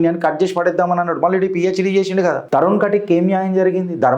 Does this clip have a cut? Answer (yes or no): yes